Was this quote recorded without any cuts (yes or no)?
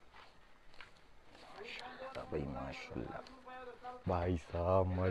no